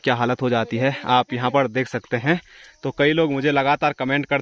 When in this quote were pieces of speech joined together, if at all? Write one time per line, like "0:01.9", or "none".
none